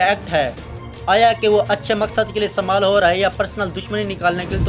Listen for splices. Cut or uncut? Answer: uncut